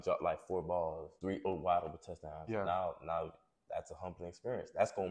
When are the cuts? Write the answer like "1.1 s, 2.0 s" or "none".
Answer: 1.1 s